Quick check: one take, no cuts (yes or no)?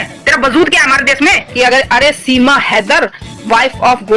no